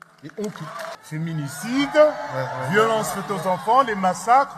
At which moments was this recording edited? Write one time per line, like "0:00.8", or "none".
0:00.9